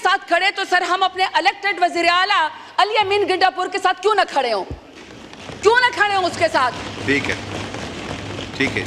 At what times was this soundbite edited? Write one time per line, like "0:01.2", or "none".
none